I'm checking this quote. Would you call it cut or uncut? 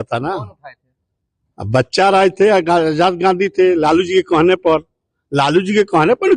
uncut